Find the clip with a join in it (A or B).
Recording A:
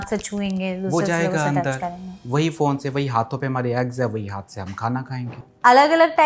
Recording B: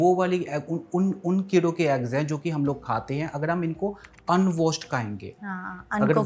A